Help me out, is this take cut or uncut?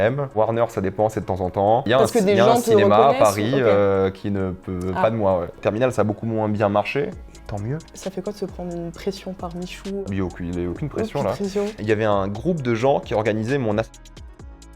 cut